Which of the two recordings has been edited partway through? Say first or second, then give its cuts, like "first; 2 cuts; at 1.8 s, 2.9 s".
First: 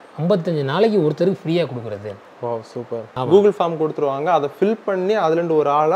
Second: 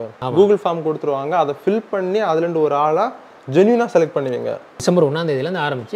second; 1 cut; at 4.8 s